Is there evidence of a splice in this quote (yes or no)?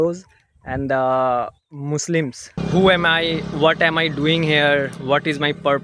yes